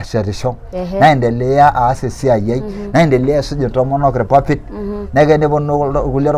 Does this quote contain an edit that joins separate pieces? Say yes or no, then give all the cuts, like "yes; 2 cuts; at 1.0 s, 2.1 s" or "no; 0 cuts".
no; 0 cuts